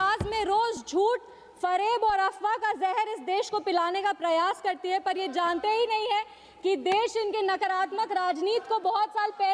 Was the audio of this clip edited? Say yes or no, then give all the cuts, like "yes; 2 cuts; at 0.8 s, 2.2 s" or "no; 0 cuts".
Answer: no; 0 cuts